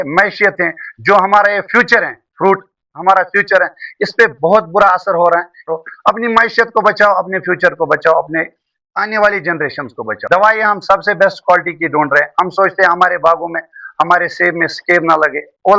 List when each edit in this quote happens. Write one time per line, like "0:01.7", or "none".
0:05.7
0:10.2